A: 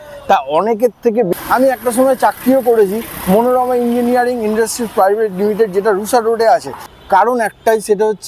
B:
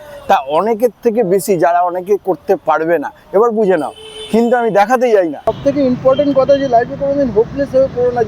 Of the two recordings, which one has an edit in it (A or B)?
A